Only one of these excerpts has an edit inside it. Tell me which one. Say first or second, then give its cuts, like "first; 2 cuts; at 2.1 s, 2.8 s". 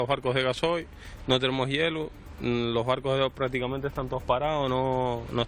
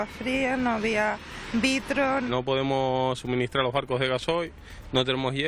second; 1 cut; at 2.3 s